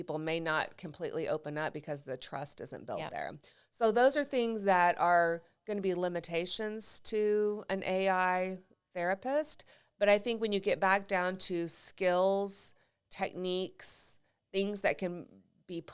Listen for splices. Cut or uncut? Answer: uncut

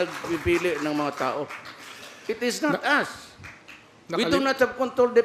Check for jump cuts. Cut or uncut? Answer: uncut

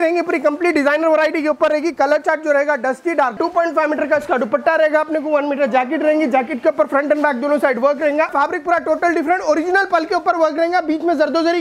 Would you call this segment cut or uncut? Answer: cut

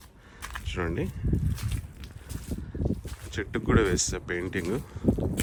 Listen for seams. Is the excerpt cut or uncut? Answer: uncut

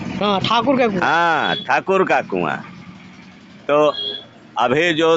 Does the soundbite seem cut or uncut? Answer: uncut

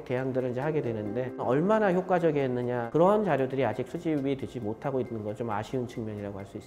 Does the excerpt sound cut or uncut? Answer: cut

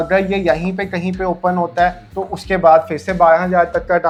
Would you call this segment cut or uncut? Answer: uncut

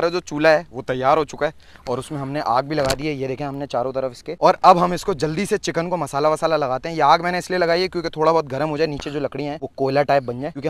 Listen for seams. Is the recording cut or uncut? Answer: uncut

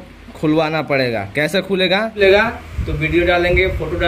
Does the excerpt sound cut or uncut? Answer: cut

